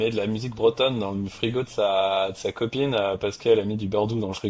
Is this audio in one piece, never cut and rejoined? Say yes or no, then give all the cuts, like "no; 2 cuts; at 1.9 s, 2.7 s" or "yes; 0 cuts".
yes; 0 cuts